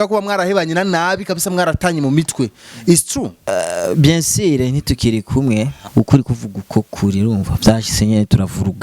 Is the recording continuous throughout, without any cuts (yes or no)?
no